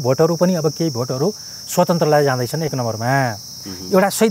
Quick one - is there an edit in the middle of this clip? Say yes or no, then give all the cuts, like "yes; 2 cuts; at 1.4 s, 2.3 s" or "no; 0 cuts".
no; 0 cuts